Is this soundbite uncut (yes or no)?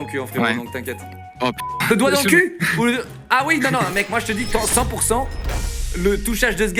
yes